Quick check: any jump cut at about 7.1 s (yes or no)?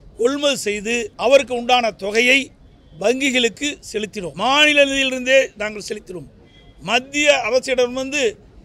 no